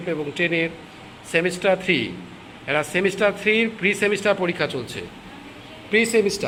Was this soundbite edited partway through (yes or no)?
no